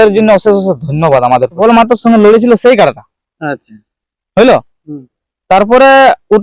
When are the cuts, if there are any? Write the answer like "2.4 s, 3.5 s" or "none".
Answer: 1.5 s